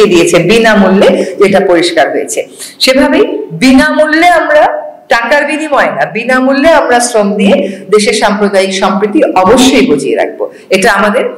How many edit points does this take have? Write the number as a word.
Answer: zero